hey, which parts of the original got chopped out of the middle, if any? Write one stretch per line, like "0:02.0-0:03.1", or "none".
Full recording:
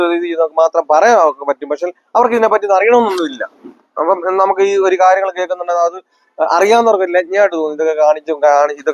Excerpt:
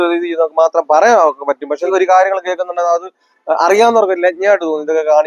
0:01.9-0:04.8